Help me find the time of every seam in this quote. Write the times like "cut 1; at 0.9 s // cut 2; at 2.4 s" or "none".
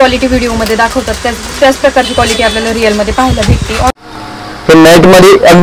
cut 1; at 3.9 s